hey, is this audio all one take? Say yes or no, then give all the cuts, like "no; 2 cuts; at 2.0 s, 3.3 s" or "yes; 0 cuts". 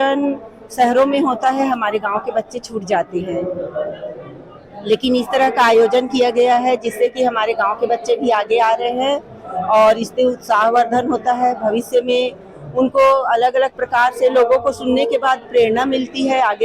yes; 0 cuts